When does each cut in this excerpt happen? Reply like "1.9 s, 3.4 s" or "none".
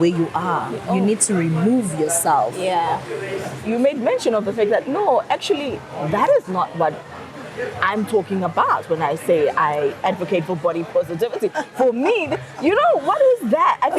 3.6 s